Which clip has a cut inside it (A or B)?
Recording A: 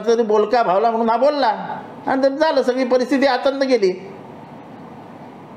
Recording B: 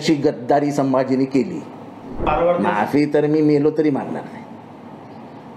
B